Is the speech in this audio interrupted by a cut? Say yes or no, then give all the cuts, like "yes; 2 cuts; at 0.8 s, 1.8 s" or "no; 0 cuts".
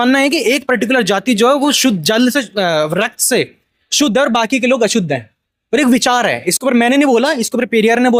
no; 0 cuts